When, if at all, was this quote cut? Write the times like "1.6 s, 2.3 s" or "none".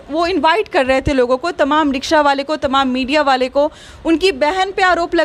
none